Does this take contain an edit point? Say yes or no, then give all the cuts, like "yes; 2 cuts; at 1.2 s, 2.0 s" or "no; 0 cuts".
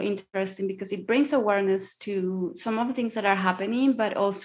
no; 0 cuts